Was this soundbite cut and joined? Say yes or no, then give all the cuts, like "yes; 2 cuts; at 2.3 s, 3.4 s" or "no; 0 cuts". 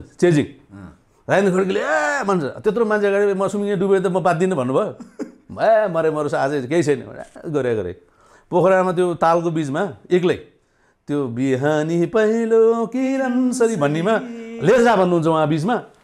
no; 0 cuts